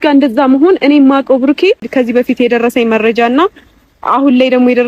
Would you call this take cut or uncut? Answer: cut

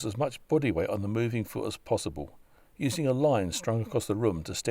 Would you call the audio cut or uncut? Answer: uncut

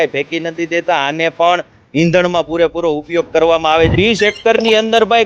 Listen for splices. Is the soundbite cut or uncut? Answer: cut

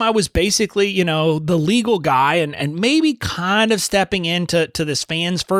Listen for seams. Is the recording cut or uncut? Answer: uncut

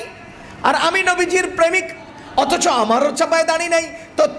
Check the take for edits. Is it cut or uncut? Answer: cut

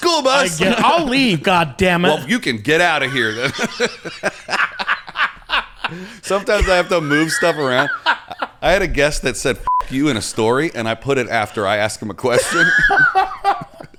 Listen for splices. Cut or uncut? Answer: uncut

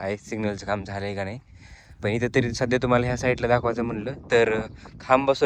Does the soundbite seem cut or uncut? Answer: uncut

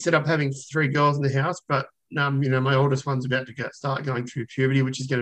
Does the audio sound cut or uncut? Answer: uncut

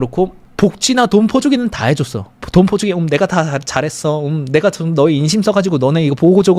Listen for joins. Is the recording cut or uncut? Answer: uncut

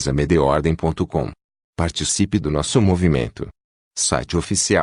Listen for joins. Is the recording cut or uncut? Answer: uncut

